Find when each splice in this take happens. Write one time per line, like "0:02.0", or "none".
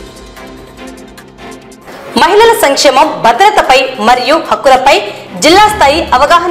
0:01.7